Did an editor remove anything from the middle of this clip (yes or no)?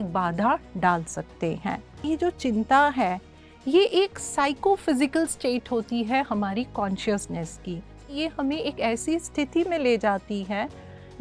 yes